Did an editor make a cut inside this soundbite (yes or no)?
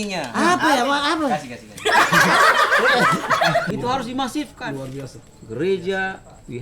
yes